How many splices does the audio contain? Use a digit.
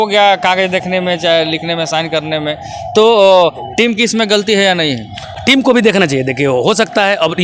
0